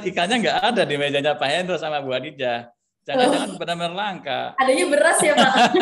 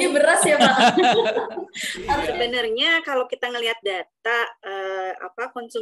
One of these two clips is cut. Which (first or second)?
second